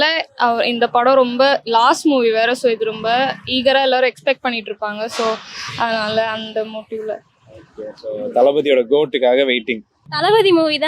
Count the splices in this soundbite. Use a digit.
1